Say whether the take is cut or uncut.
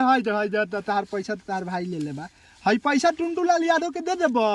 uncut